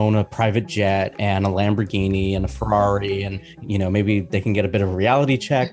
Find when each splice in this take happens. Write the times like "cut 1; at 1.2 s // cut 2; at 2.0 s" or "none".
cut 1; at 3.5 s